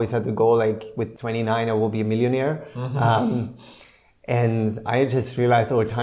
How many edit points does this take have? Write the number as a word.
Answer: one